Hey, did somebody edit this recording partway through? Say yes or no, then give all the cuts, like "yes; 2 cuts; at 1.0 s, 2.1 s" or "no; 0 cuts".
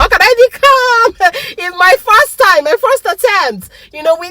no; 0 cuts